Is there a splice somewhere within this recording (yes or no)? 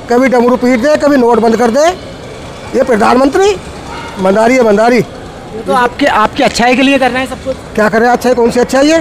no